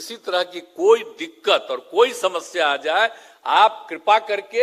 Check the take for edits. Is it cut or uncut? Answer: uncut